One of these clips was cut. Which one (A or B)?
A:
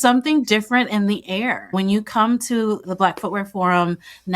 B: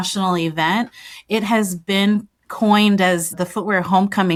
A